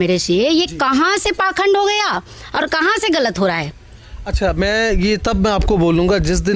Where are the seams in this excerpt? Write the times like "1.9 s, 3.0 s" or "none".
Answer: none